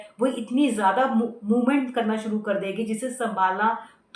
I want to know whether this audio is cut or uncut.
uncut